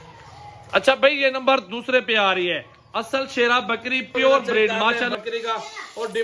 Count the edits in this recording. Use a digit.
1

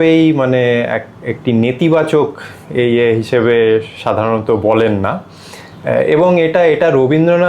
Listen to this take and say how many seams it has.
0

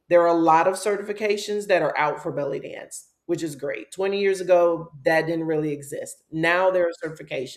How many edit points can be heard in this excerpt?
0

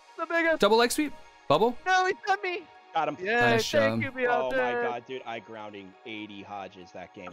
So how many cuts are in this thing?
0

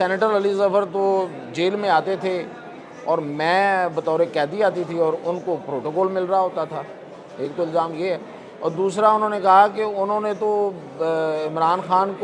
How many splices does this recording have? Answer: 0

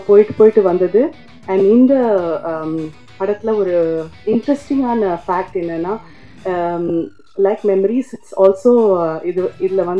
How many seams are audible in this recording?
0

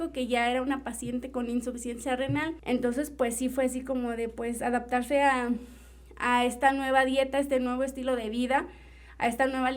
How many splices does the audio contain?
1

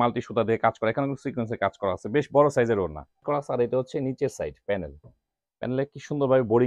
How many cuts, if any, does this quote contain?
1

